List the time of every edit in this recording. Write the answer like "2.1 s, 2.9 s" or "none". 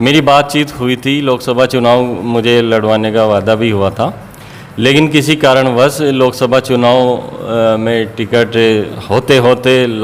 none